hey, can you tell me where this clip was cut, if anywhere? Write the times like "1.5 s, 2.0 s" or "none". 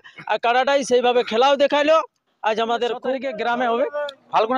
3.3 s